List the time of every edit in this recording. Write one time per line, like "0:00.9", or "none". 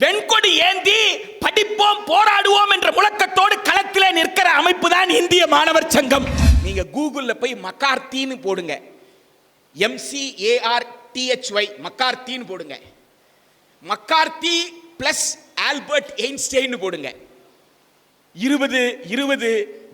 0:06.5